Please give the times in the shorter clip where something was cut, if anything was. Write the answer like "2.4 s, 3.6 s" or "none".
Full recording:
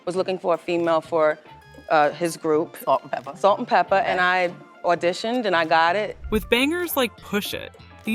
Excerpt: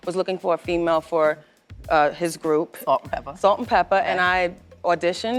none